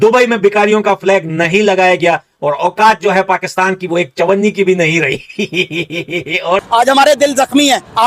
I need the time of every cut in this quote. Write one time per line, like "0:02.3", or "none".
0:06.6